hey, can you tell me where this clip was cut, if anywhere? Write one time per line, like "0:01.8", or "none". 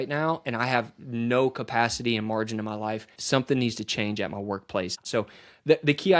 0:03.2
0:05.0